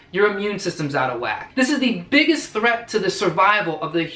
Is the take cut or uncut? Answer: cut